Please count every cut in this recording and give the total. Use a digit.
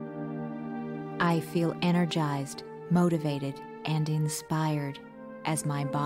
1